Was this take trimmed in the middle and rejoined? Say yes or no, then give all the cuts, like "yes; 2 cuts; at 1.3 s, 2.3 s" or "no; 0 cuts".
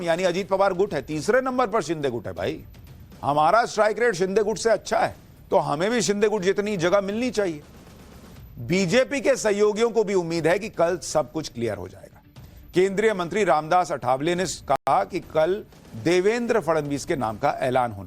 no; 0 cuts